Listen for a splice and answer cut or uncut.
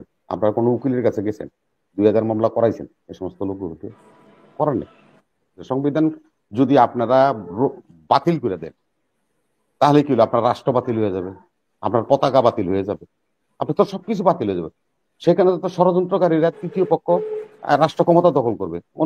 cut